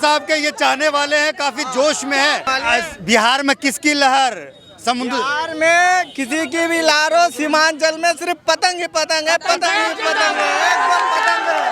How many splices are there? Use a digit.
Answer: 1